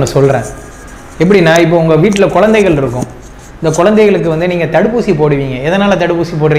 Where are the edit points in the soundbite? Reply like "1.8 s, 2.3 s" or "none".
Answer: none